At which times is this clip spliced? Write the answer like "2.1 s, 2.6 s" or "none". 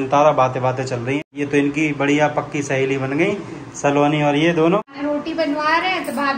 1.2 s, 4.9 s